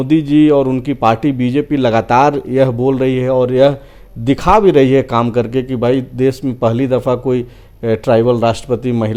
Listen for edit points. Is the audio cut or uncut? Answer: uncut